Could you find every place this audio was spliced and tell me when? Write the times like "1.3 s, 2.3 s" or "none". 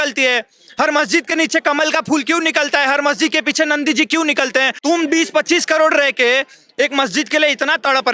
4.7 s